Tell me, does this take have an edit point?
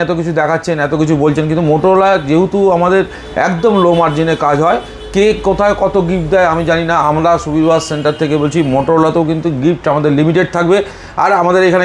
no; 0 cuts

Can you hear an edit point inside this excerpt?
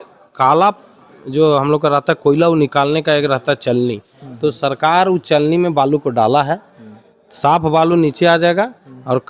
no; 0 cuts

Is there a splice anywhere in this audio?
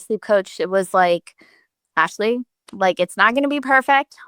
no; 0 cuts

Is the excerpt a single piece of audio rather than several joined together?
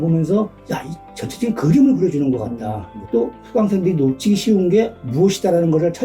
no; 1 cut; at 3.4 s

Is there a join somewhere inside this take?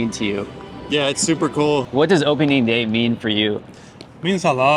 yes; 1 cut; at 1.9 s

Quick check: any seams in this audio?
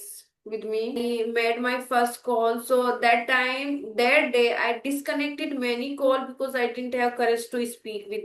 yes; 1 cut; at 1.0 s

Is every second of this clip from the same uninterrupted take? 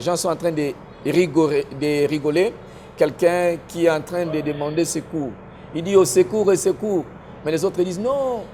yes; 0 cuts

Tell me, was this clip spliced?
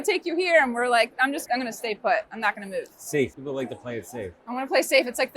yes; 2 cuts; at 1.4 s, 3.4 s

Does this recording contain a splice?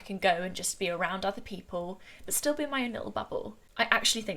no; 0 cuts

